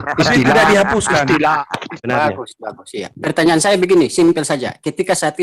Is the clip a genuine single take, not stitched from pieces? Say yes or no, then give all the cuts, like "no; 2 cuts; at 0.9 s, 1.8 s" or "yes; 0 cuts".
no; 1 cut; at 2.0 s